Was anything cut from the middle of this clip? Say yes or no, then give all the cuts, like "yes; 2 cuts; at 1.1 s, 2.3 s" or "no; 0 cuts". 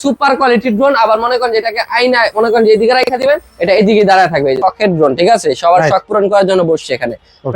yes; 1 cut; at 4.6 s